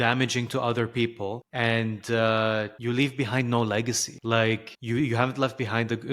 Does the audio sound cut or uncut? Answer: cut